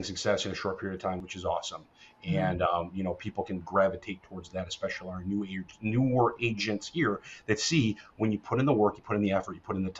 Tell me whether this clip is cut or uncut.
cut